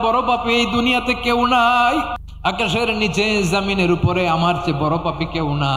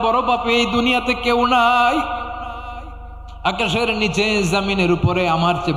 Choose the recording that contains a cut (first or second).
first